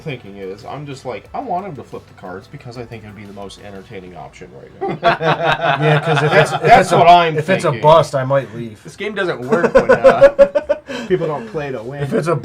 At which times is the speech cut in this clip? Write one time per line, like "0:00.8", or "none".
none